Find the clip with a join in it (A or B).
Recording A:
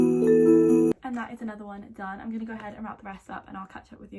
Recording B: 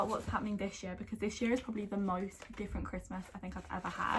A